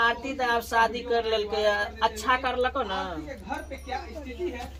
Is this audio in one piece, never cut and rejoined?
yes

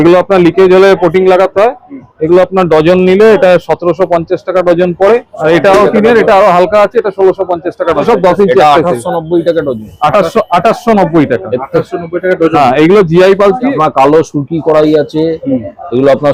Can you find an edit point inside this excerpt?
yes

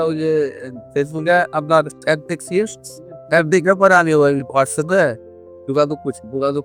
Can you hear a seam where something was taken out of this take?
no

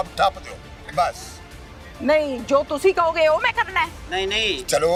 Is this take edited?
no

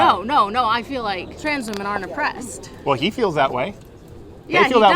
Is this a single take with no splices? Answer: no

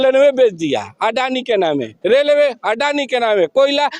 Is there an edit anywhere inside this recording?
no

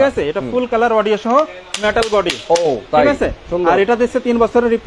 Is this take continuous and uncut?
yes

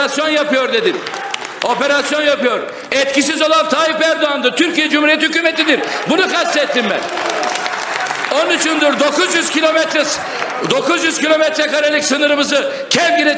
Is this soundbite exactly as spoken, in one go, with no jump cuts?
yes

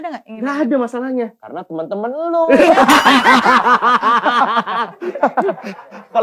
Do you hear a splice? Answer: no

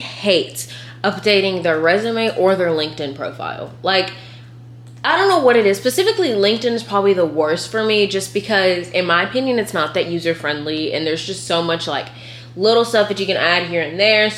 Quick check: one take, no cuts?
yes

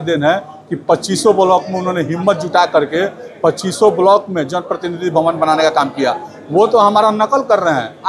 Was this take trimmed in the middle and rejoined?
no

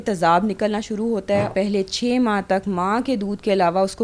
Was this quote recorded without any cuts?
no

